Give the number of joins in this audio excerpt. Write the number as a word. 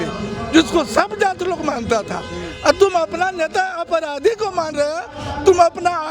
zero